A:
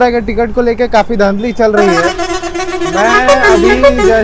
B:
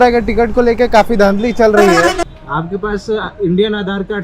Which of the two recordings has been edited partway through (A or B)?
B